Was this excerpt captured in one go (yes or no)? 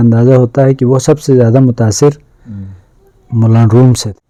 yes